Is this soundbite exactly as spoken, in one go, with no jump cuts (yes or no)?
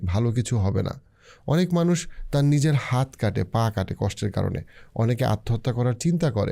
yes